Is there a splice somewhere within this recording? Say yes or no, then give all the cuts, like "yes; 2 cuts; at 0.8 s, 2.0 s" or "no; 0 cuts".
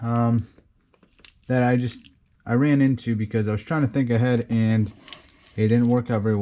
no; 0 cuts